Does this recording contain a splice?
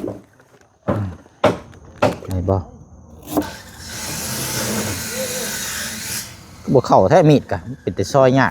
yes; 1 cut; at 2.2 s

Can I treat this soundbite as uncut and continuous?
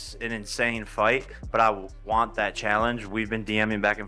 yes; 0 cuts

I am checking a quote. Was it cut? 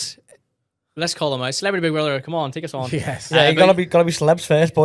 no; 0 cuts

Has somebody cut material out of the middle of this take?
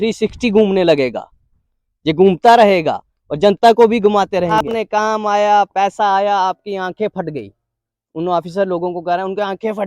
yes; 1 cut; at 4.7 s

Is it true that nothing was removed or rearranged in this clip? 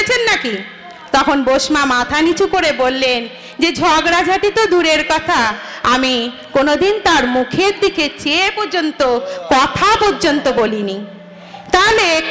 yes; 0 cuts

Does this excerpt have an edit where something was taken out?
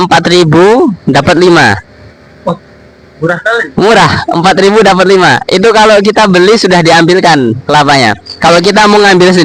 no; 0 cuts

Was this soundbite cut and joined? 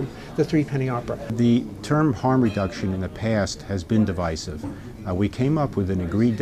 yes; 1 cut; at 1.3 s

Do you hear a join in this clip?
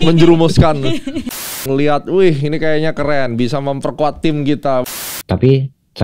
yes; 2 cuts; at 1.7 s, 4.8 s

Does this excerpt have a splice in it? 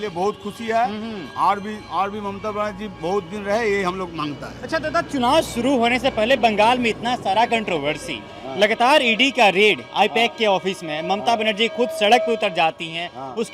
no; 0 cuts

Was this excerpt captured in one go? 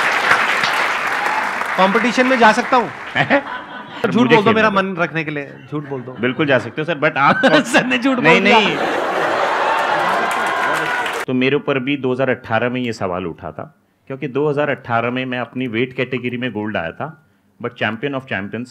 no; 3 cuts; at 1.0 s, 4.0 s, 11.2 s

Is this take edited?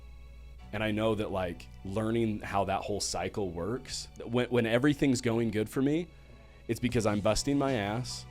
yes; 1 cut; at 4.2 s

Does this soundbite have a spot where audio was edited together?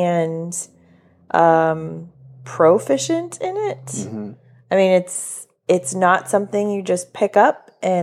no; 0 cuts

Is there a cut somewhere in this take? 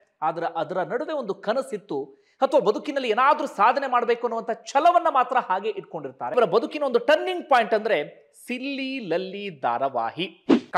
yes; 1 cut; at 6.3 s

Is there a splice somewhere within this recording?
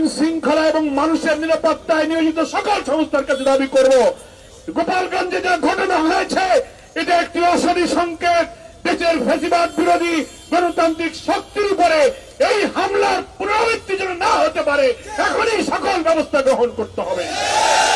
no; 0 cuts

